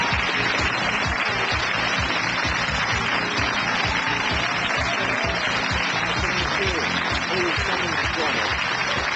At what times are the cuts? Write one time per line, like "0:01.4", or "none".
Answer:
none